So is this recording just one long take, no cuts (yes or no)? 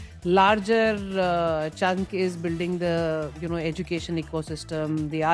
yes